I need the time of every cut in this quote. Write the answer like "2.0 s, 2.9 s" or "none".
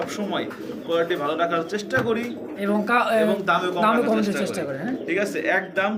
none